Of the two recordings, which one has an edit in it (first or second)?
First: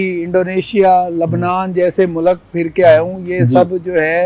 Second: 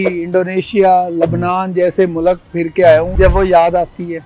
second